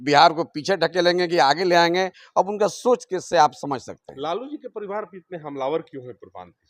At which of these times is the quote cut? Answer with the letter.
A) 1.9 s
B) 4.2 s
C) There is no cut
C